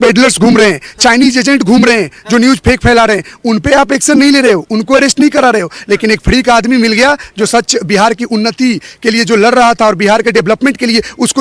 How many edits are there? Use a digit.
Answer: 0